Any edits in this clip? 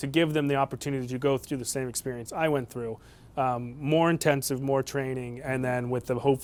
no; 0 cuts

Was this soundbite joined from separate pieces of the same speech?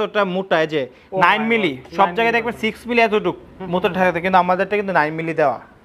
no; 0 cuts

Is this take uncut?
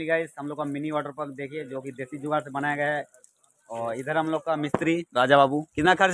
yes; 0 cuts

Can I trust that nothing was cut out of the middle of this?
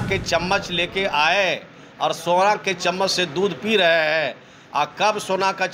yes; 0 cuts

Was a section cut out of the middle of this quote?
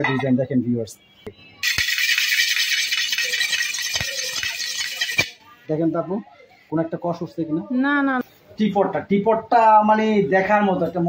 yes; 2 cuts; at 1.3 s, 8.3 s

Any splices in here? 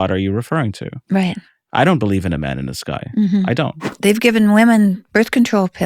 yes; 1 cut; at 4.0 s

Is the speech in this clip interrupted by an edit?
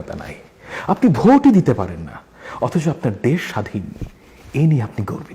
no; 0 cuts

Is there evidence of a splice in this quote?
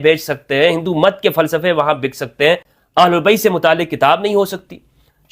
yes; 1 cut; at 2.7 s

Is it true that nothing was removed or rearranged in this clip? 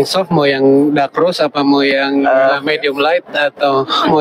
yes; 0 cuts

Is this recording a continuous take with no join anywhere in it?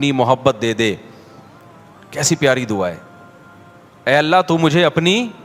yes; 0 cuts

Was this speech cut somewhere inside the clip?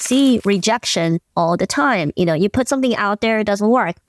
no; 0 cuts

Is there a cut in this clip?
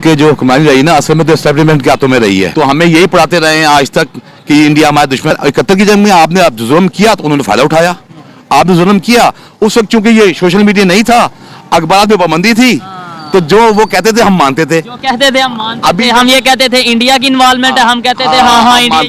yes; 2 cuts; at 2.5 s, 5.3 s

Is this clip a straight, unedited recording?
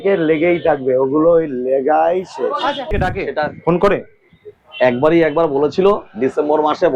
no; 1 cut; at 2.9 s

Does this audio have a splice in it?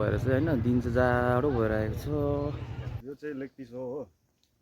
yes; 1 cut; at 3.0 s

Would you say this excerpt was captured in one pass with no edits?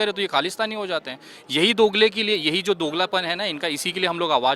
yes; 0 cuts

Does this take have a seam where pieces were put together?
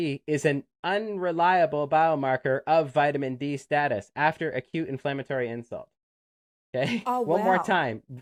no; 0 cuts

